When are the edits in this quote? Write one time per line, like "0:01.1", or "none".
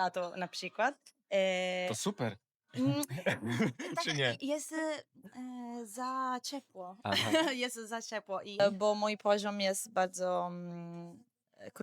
0:08.6